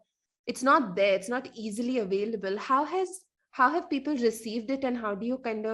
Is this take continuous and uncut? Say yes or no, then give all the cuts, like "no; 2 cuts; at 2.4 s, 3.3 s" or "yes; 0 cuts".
yes; 0 cuts